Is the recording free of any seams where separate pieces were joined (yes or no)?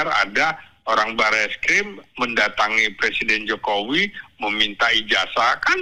yes